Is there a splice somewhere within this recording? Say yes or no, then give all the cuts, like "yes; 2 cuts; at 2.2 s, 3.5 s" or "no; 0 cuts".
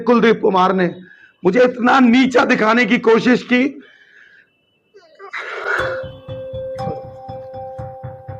yes; 1 cut; at 5.7 s